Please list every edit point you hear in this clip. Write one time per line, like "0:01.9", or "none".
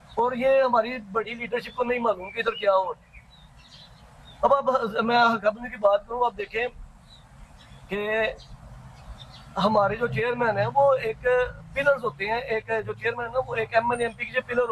none